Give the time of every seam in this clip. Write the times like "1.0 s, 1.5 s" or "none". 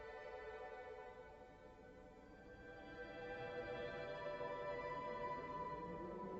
none